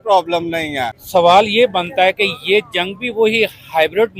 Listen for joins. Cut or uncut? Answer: cut